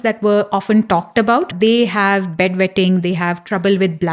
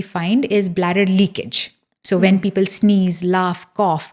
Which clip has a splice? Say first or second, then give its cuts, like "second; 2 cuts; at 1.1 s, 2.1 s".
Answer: first; 1 cut; at 1.5 s